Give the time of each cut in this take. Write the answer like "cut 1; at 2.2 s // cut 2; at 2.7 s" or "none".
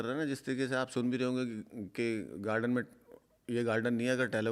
none